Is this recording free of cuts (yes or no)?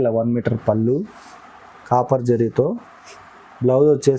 yes